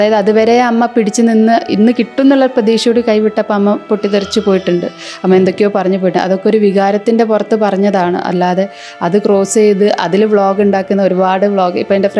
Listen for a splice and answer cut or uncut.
uncut